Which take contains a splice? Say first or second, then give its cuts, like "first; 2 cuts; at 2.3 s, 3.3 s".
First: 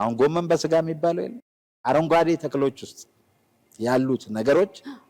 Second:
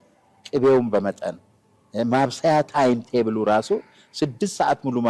first; 1 cut; at 1.7 s